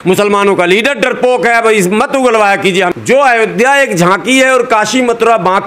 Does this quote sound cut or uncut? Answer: cut